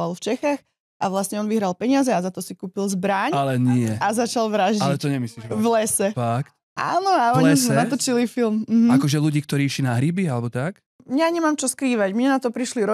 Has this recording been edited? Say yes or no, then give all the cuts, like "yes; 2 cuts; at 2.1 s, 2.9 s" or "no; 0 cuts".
yes; 1 cut; at 11.0 s